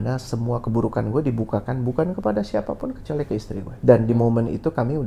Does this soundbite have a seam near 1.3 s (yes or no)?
no